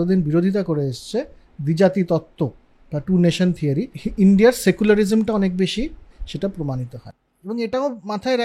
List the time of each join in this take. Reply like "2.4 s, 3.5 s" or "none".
4.0 s, 6.2 s, 7.0 s